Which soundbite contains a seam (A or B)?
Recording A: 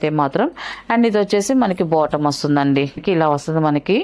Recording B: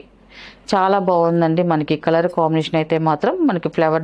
A